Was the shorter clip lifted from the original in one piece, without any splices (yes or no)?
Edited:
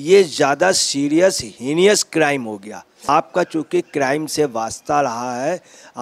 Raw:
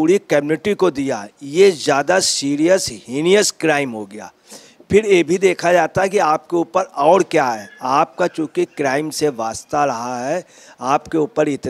no